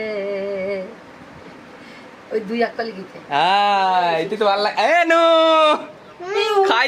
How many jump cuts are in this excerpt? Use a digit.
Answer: 0